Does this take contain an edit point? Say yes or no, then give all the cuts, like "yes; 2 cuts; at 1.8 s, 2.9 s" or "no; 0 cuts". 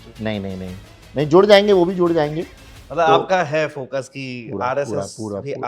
no; 0 cuts